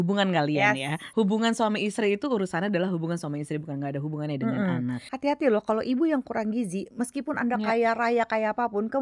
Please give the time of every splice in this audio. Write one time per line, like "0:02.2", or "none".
0:01.0
0:05.0